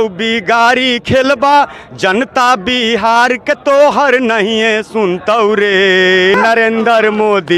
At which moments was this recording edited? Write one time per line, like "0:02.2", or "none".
0:06.4